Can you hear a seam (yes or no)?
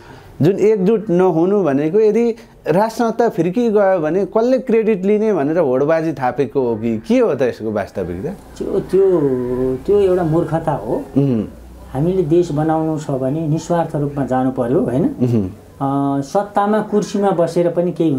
no